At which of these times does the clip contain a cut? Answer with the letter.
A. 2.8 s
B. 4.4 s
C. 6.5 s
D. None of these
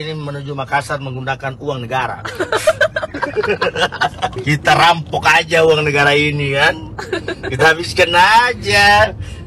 B